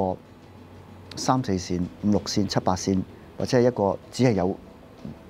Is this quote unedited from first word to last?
yes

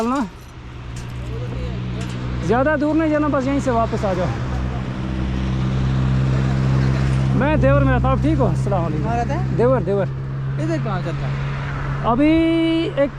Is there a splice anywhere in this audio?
no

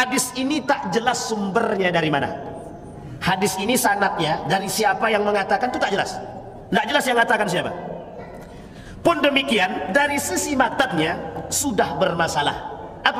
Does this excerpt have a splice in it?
no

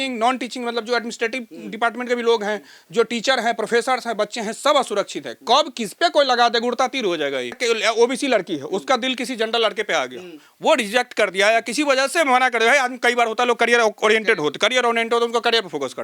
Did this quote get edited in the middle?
yes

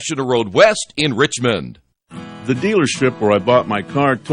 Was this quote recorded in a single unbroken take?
no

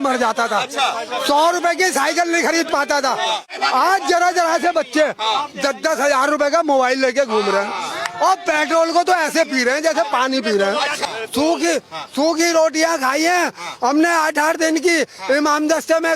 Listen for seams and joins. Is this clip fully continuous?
no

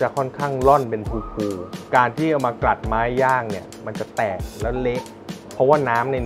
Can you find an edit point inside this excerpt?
no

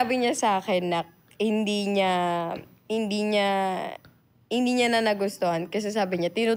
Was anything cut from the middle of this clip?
no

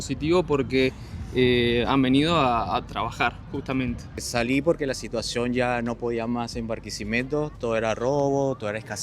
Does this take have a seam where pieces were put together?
yes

